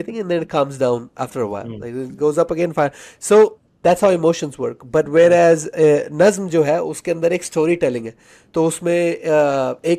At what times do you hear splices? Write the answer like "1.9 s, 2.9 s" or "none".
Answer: none